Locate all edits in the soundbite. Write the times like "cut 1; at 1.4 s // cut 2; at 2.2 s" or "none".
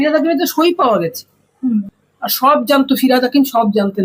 cut 1; at 2.0 s